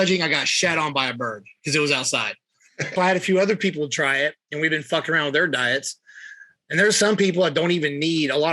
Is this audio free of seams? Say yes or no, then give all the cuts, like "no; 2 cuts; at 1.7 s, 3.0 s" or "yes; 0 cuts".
no; 1 cut; at 2.9 s